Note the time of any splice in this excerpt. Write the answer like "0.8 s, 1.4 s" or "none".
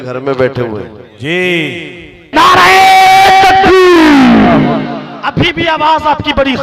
2.3 s